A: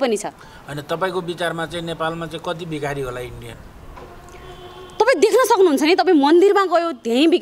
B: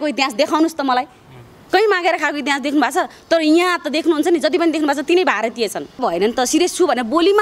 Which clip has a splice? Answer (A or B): B